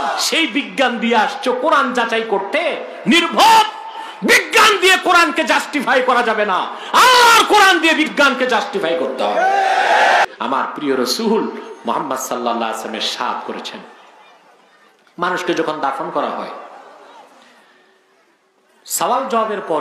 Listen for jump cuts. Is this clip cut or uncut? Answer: cut